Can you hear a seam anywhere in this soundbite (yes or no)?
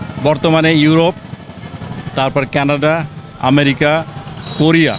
no